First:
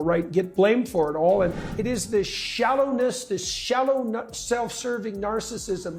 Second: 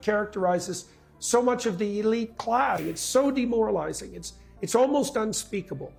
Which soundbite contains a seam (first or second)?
first